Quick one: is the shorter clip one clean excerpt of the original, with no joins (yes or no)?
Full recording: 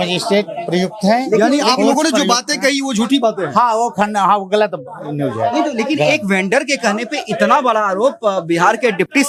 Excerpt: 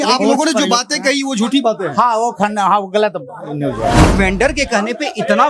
no